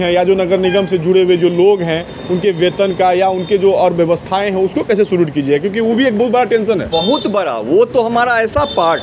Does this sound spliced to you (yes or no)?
no